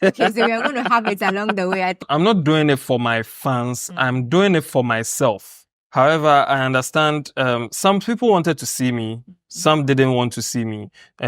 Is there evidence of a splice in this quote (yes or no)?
yes